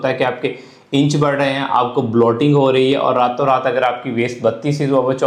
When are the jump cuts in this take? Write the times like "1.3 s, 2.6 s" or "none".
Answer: none